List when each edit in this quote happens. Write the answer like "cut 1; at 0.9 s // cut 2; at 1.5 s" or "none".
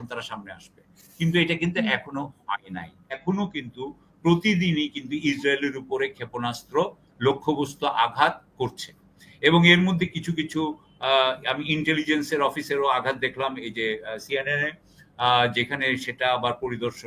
cut 1; at 3.2 s